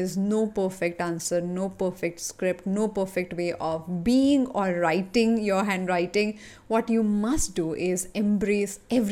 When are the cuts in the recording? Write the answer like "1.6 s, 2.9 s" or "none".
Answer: none